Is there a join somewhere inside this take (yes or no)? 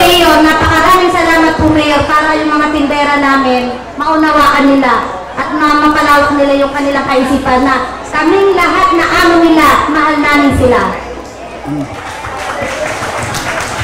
no